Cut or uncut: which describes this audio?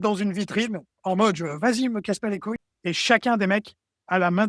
cut